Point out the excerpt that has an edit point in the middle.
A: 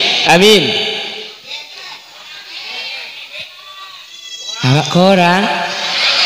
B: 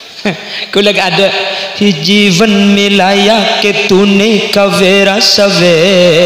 A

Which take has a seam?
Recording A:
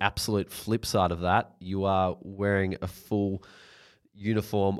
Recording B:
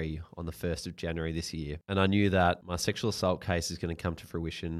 B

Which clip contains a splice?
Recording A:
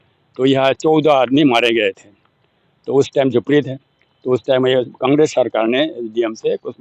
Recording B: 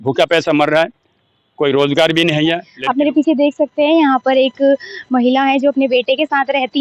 B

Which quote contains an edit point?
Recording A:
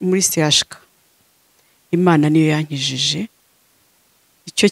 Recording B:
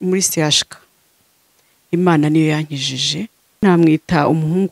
B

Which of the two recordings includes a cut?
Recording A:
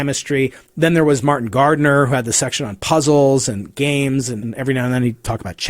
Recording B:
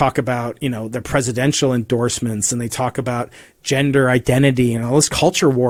A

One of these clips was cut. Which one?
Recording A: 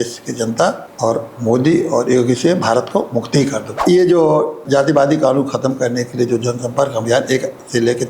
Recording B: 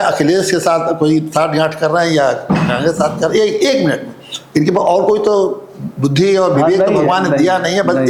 A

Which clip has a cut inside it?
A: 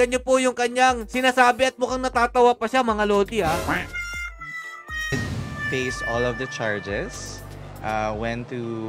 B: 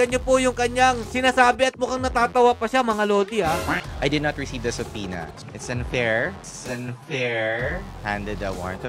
B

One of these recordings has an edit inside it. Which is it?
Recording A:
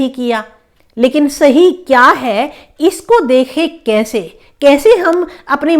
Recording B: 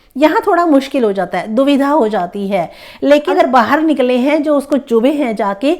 B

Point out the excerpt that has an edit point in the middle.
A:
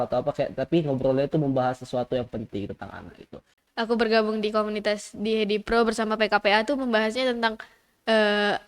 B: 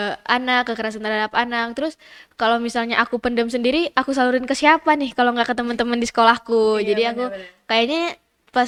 A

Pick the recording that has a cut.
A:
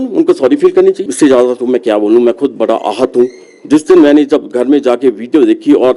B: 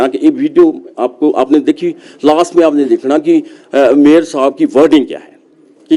A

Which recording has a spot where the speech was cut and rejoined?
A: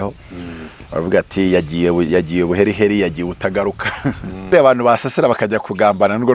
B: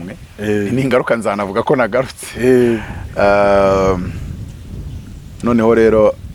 A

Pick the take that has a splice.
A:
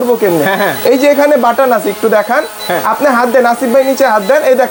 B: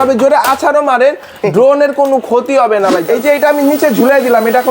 B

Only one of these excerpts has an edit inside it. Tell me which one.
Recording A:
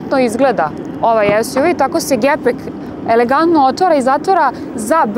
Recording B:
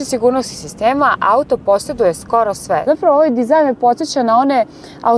B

